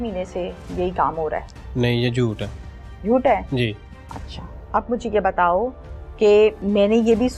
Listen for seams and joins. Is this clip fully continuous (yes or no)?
yes